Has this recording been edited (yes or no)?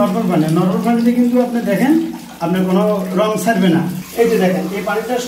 yes